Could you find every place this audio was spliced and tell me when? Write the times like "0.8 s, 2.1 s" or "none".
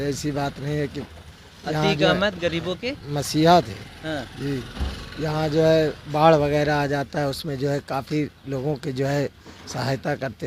none